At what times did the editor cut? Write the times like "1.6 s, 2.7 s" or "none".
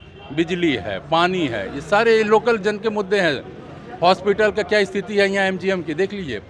none